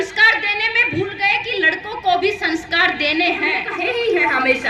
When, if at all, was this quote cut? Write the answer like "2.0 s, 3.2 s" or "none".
3.7 s